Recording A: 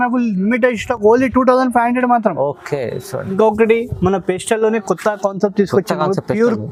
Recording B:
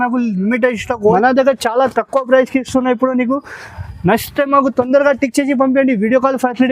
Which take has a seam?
B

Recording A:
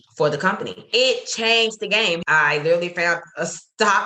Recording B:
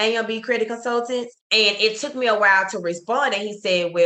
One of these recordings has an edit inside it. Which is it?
A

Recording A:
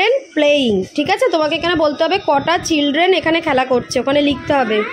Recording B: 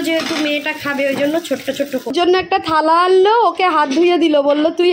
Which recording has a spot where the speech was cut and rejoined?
B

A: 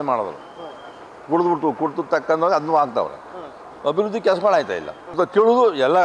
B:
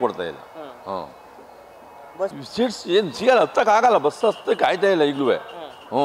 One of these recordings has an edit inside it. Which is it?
A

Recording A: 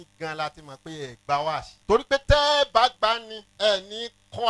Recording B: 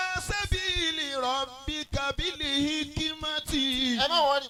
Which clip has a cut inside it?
A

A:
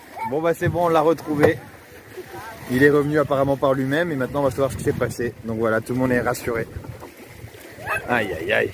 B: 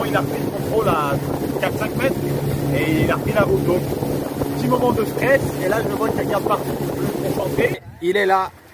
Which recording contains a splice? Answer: B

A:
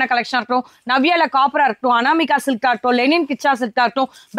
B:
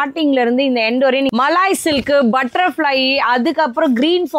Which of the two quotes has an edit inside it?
B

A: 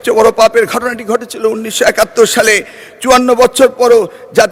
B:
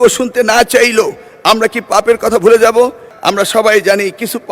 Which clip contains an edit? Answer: B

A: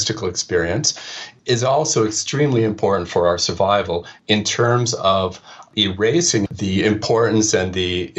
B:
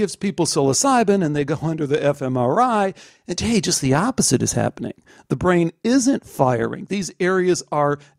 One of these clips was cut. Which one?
A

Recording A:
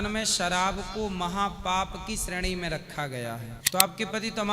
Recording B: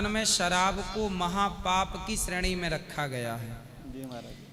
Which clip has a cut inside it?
A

